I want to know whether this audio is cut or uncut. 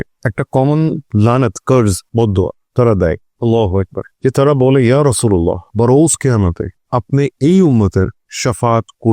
cut